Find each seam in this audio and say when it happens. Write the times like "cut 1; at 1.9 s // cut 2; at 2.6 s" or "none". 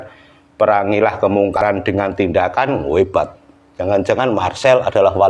cut 1; at 1.6 s